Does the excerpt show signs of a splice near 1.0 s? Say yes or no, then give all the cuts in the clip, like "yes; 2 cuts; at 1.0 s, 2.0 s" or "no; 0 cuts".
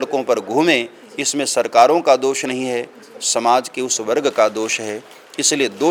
no; 0 cuts